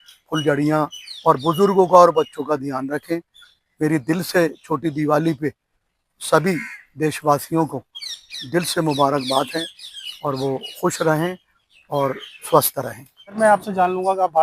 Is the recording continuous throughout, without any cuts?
no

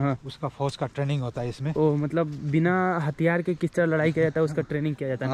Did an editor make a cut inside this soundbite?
no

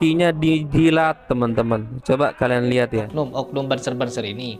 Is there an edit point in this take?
yes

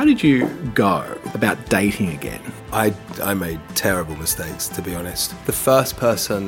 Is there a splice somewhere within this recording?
yes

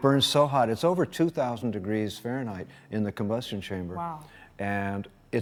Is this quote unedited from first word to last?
yes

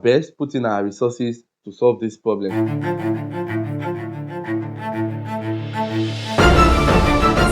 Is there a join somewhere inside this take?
yes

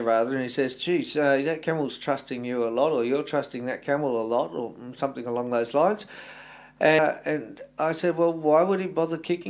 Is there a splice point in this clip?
yes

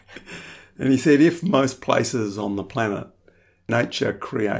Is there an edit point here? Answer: yes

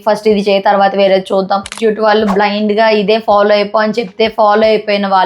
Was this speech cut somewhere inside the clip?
yes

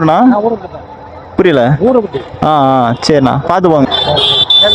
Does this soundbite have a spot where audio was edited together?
yes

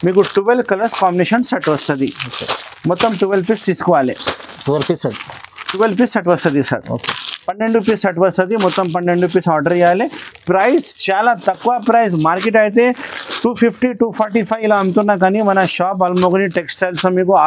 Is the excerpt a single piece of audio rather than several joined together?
yes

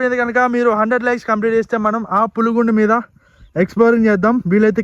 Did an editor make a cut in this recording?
no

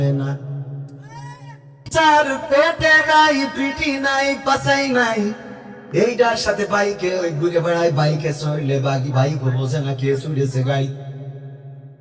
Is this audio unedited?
no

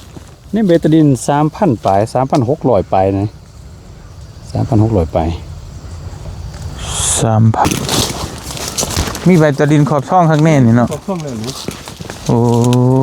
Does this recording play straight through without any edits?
no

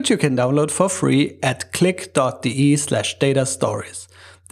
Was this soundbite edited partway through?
no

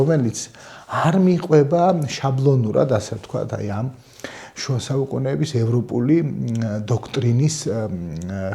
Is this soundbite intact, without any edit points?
yes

